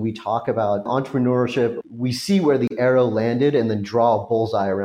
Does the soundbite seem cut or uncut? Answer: cut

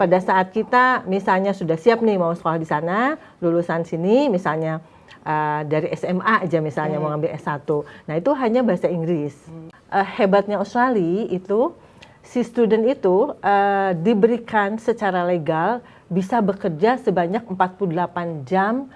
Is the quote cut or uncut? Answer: cut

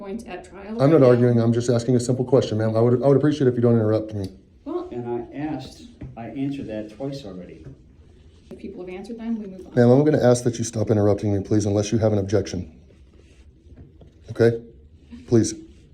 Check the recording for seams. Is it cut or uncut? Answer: cut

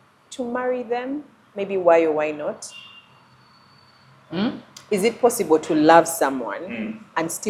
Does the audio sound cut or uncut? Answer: uncut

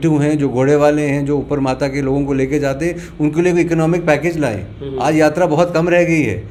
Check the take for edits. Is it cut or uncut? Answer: uncut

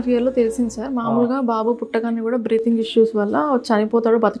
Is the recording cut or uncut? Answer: uncut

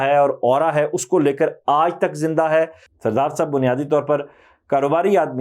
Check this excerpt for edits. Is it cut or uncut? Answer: cut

